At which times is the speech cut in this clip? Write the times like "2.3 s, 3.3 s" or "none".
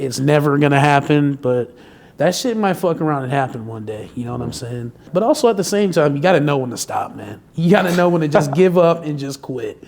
5.1 s